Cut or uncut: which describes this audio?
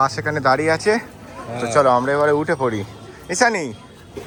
uncut